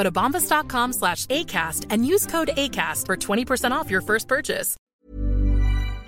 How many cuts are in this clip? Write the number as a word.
one